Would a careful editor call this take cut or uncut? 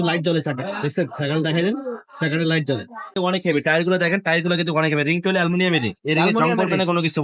cut